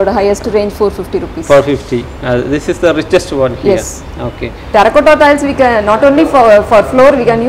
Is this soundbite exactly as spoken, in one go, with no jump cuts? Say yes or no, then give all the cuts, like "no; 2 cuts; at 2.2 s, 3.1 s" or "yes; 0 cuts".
no; 1 cut; at 4.6 s